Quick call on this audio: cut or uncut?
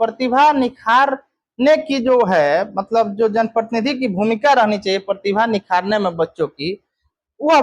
uncut